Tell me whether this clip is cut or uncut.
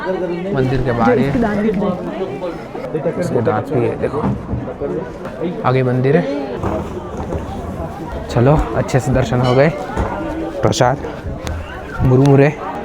uncut